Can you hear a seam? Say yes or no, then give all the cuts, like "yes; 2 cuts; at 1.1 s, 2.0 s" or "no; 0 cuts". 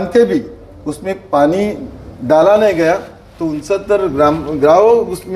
no; 0 cuts